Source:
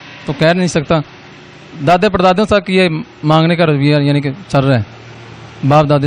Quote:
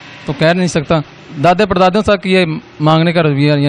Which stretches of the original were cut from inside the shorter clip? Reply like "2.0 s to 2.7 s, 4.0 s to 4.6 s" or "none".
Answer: 1.2 s to 1.6 s